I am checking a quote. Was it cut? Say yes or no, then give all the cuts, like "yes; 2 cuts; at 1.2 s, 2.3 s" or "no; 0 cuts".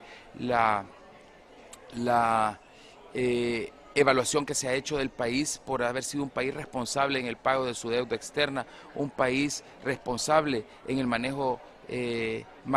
no; 0 cuts